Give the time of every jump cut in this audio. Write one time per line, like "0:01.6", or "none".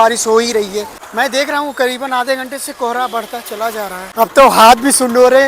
0:01.0
0:04.0